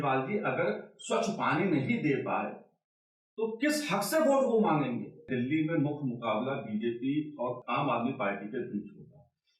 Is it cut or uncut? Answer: cut